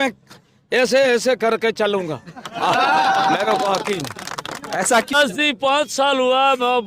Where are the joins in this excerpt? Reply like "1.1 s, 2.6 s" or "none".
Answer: 5.1 s